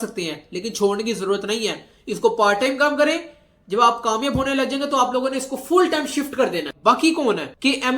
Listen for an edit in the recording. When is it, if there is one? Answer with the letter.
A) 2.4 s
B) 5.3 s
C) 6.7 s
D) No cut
C